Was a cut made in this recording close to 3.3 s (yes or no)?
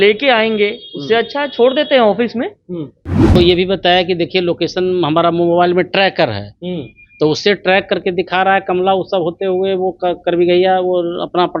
yes